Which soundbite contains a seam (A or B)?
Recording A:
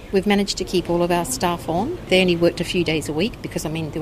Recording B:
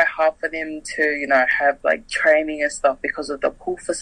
A